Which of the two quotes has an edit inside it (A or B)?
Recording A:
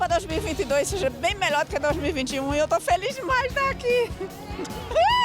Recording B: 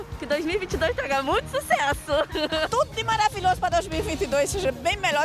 B